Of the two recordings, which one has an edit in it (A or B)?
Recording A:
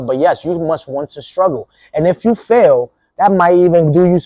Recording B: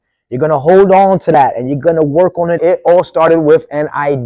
B